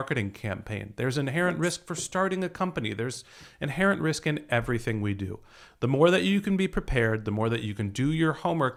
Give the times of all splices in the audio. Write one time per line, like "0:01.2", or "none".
none